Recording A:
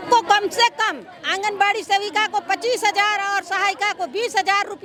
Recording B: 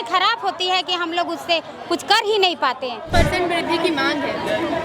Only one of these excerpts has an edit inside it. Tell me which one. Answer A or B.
B